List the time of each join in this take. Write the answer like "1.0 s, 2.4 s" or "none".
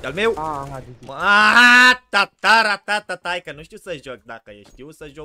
none